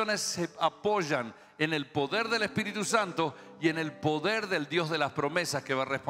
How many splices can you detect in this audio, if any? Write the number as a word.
zero